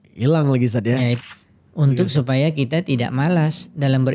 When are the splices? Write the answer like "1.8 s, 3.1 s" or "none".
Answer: 1.2 s